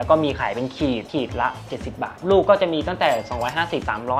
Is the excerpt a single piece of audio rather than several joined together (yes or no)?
yes